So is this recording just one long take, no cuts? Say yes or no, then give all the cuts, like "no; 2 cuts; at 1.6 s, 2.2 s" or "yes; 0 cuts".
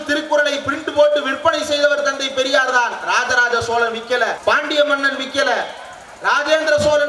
yes; 0 cuts